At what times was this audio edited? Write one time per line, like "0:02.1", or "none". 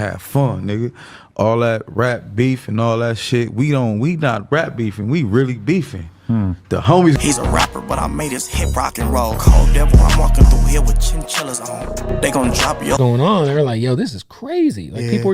0:07.2
0:13.0